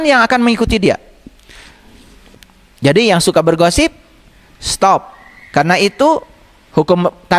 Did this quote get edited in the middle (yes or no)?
yes